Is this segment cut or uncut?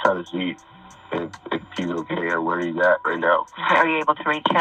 cut